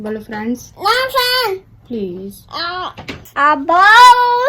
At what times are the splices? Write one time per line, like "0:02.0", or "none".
0:03.3